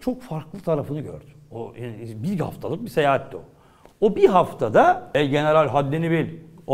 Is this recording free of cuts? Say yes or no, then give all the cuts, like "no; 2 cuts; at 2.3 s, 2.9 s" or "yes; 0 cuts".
no; 1 cut; at 5.1 s